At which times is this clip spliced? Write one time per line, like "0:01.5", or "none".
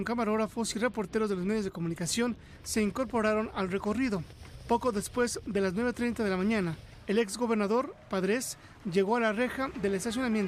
none